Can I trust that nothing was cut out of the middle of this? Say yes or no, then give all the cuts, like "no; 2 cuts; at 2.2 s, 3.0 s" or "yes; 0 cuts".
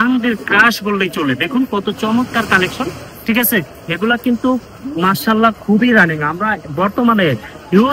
yes; 0 cuts